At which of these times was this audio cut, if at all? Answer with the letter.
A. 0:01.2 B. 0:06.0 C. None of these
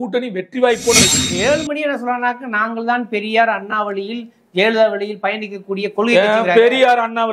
A